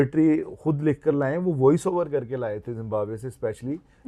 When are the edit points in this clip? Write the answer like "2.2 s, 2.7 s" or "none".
none